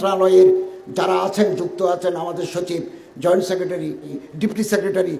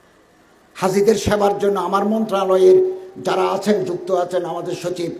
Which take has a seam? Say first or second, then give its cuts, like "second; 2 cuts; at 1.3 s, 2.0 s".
first; 1 cut; at 4.2 s